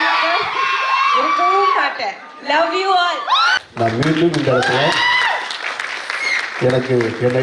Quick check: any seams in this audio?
yes; 1 cut; at 3.5 s

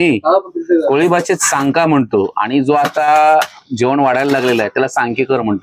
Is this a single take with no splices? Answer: yes; 0 cuts

